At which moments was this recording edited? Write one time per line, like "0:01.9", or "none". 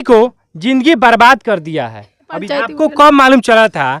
0:02.5